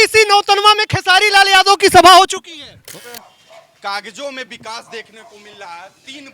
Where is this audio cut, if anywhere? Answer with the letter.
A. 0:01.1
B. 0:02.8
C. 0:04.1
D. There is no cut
B